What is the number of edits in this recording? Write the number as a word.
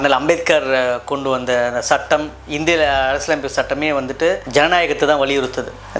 zero